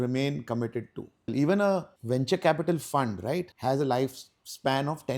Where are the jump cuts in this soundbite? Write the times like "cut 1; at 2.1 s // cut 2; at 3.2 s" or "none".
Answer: cut 1; at 1.3 s // cut 2; at 1.9 s // cut 3; at 3.5 s